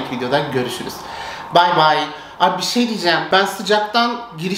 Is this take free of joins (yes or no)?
no